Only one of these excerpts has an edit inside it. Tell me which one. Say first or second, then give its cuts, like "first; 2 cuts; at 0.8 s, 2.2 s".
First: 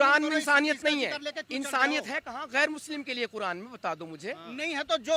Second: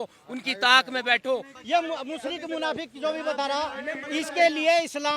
second; 1 cut; at 1.5 s